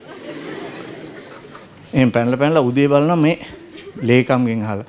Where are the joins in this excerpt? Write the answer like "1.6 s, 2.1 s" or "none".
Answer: 1.7 s

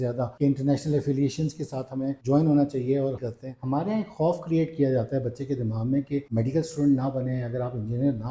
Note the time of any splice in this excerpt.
3.3 s, 6.3 s

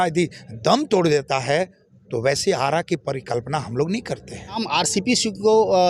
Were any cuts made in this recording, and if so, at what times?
4.6 s

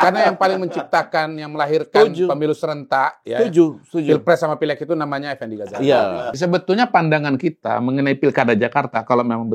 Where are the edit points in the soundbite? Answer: 6.3 s

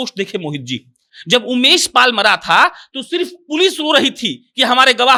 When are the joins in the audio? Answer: none

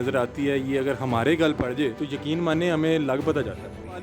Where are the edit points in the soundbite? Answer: 2.1 s

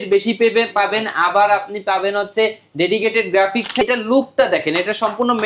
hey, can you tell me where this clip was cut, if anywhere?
3.8 s

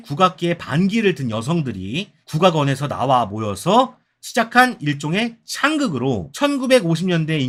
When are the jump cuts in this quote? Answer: none

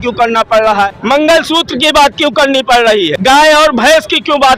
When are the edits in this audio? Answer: 0.9 s, 3.1 s

